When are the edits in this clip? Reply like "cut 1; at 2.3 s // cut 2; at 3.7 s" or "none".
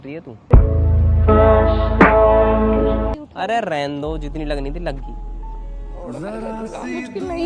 cut 1; at 3.2 s

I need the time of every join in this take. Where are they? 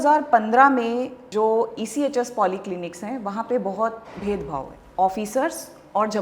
cut 1; at 1.2 s

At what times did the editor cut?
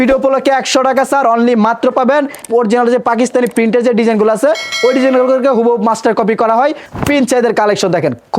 cut 1; at 2.4 s // cut 2; at 6.9 s

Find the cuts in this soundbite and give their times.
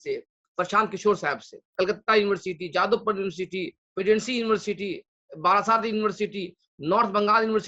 cut 1; at 1.6 s

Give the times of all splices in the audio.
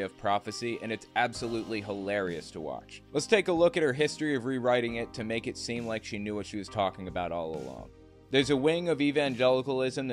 cut 1; at 8.2 s

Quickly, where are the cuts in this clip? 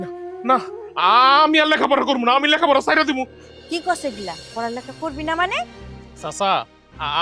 cut 1; at 3.3 s // cut 2; at 6.0 s

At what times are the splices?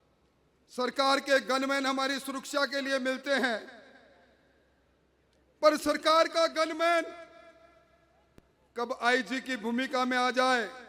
none

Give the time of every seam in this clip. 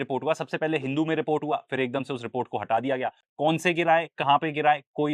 cut 1; at 3.2 s

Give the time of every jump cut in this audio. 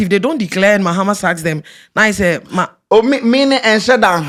none

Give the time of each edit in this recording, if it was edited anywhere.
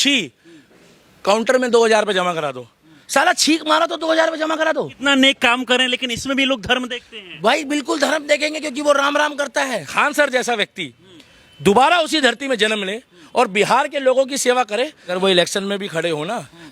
cut 1; at 4.9 s // cut 2; at 9.9 s // cut 3; at 15.2 s

